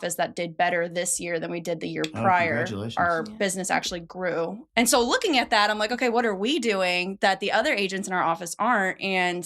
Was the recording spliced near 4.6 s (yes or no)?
yes